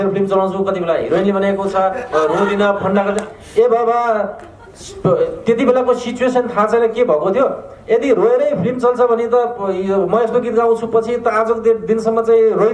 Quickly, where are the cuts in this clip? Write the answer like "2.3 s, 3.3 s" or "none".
none